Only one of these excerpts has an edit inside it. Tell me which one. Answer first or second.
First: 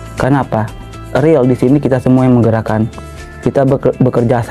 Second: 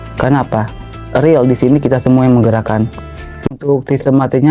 second